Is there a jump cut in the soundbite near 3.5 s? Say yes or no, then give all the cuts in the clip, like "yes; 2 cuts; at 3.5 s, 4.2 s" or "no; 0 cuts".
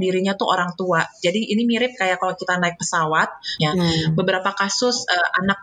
yes; 1 cut; at 3.5 s